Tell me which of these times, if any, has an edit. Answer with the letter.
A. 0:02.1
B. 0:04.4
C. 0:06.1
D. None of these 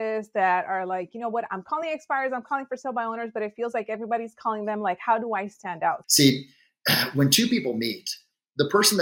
C